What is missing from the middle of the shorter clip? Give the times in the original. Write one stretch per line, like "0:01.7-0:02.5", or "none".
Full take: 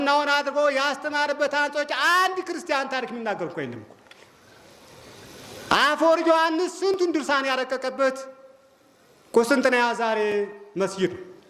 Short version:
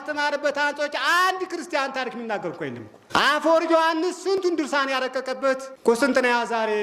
0:03.9-0:05.5
0:08.3-0:09.2